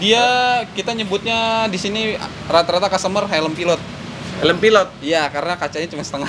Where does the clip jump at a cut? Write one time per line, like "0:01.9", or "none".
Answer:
none